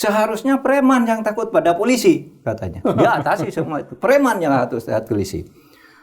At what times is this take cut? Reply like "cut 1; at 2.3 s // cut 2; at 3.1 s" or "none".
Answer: none